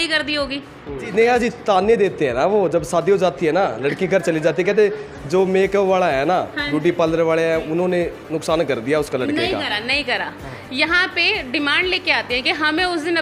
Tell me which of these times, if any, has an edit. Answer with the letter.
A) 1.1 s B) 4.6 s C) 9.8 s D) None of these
A